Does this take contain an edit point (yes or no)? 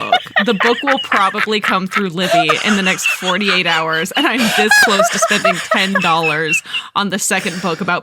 no